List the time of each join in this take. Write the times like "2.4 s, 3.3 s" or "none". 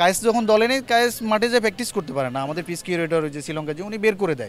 none